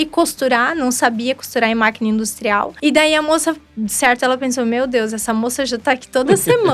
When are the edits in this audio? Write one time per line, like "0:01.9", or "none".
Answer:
0:02.7